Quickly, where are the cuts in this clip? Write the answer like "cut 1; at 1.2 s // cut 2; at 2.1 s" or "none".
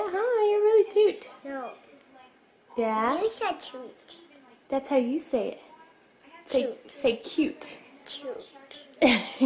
none